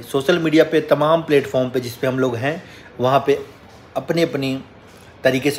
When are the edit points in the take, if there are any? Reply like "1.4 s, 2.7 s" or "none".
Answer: none